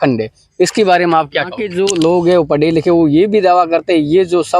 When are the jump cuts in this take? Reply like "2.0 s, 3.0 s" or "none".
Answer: 1.6 s